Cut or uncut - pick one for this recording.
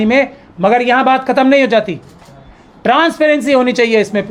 uncut